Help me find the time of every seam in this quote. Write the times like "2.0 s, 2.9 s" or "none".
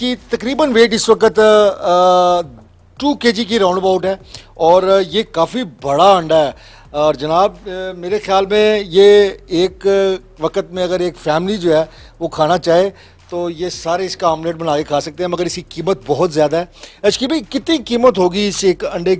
none